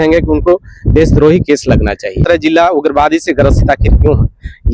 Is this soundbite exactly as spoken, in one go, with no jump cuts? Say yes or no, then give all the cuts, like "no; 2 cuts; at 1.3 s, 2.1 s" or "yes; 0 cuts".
no; 1 cut; at 2.2 s